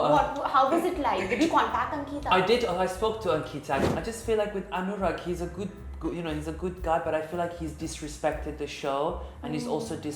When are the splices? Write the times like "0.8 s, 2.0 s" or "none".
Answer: 3.9 s